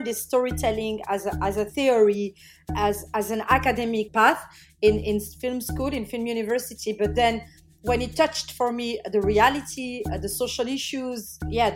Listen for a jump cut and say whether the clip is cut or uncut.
cut